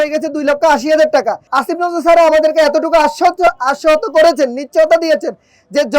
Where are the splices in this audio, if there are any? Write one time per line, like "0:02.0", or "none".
0:01.5